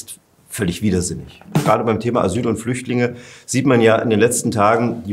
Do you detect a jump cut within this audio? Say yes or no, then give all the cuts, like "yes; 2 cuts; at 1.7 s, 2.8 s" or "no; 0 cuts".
yes; 1 cut; at 1.6 s